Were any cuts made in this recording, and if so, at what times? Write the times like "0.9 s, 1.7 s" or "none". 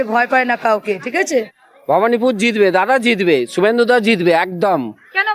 1.3 s